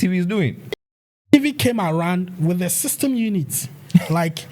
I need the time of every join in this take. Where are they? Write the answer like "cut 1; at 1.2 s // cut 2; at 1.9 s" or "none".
cut 1; at 1.2 s